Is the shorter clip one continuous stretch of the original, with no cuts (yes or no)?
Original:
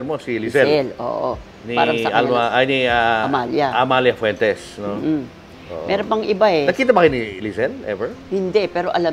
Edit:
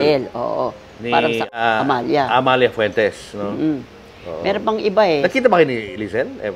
no